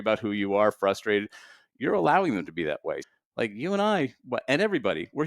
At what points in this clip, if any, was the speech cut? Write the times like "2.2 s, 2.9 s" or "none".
3.0 s